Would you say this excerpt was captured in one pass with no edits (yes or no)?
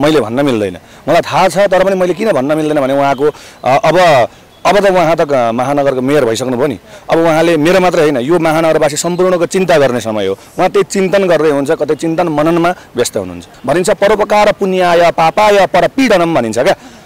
no